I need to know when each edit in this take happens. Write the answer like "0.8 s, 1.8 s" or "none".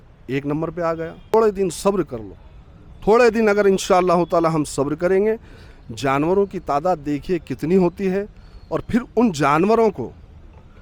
1.3 s

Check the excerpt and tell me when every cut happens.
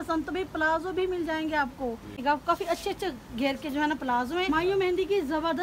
2.1 s, 4.5 s

